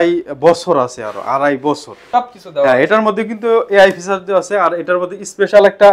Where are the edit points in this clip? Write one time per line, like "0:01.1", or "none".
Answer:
0:01.9